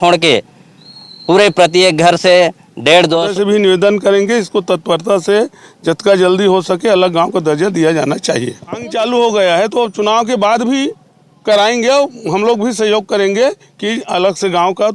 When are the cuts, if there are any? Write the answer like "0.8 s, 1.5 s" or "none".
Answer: 3.3 s, 8.9 s